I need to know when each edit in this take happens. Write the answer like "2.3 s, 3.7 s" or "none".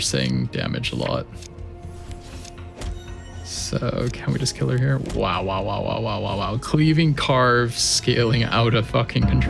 none

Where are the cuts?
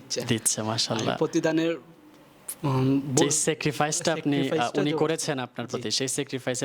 none

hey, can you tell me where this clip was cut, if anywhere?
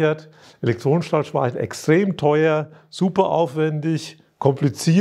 none

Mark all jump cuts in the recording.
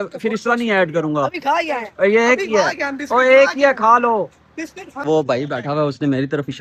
5.0 s

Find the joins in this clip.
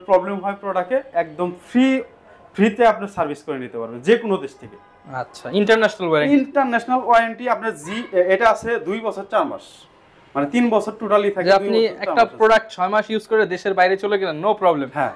none

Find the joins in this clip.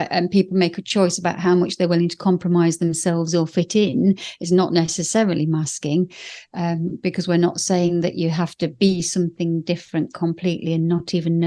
none

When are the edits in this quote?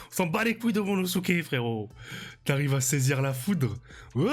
none

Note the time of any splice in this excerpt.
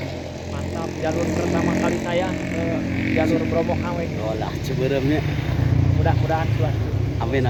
none

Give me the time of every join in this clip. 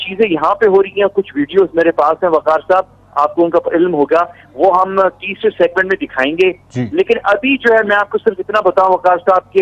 8.4 s

